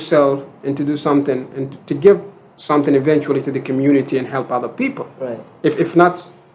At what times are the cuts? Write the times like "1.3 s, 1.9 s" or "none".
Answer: none